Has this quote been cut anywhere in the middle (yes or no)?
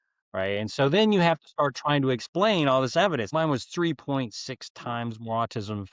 yes